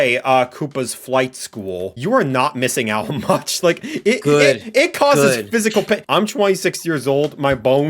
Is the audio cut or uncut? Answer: cut